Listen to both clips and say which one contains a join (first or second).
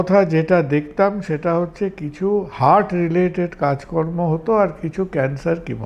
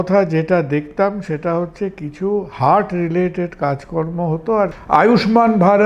second